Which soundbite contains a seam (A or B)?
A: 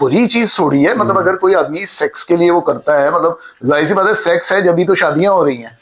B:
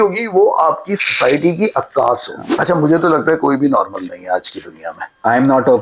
B